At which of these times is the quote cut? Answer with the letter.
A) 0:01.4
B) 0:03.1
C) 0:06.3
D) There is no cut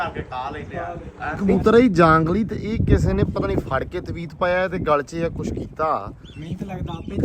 A